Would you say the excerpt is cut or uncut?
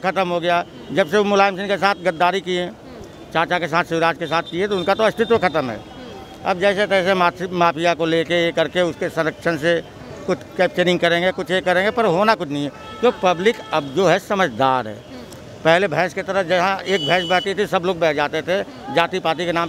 uncut